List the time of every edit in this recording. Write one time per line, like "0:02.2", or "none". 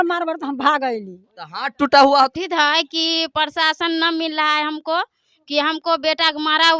0:02.4

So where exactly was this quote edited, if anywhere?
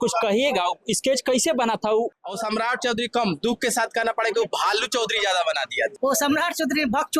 0:02.1
0:06.0

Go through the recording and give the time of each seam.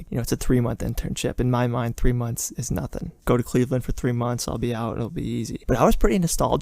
0:03.2

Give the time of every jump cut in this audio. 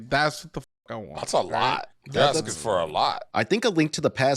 0:02.0
0:03.2

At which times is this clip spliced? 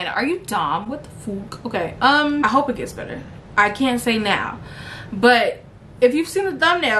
0:02.4

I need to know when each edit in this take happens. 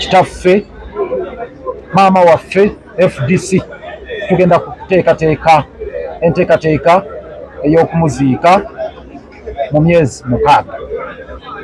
none

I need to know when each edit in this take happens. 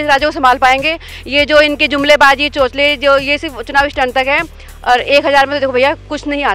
none

